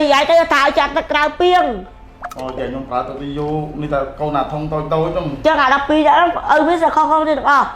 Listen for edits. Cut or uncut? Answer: cut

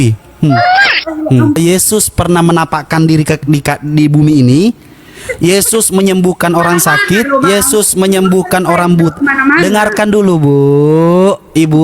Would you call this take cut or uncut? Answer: cut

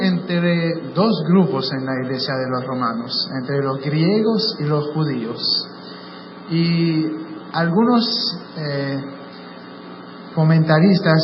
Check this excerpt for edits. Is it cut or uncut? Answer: cut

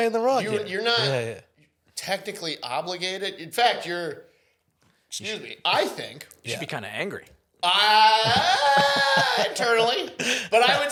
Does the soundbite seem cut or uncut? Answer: uncut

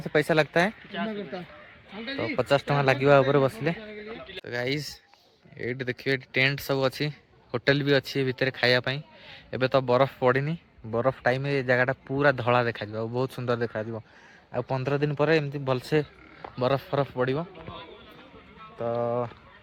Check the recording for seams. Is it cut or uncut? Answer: uncut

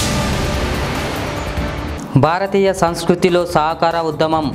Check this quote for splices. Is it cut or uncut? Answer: cut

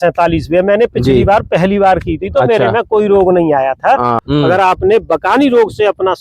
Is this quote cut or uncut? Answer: cut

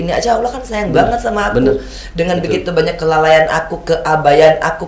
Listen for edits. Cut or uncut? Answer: uncut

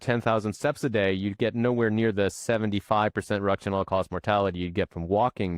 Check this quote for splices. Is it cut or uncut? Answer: uncut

